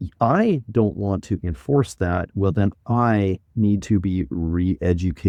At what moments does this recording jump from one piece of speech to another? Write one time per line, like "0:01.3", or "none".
none